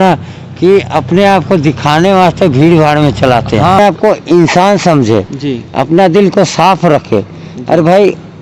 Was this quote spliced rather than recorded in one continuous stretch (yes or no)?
yes